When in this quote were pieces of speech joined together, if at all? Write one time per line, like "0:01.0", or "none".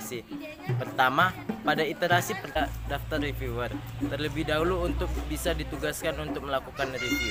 none

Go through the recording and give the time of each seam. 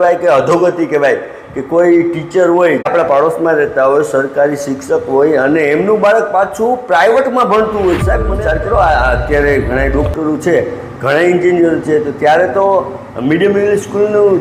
0:02.9
0:08.3

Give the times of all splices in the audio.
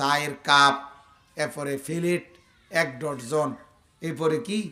none

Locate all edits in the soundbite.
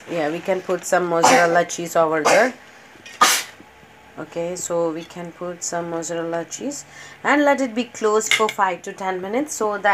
none

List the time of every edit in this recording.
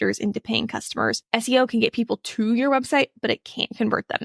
0:01.2

